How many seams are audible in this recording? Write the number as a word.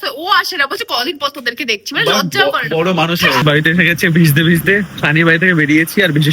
one